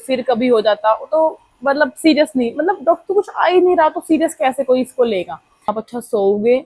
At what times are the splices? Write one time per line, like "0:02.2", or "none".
0:05.7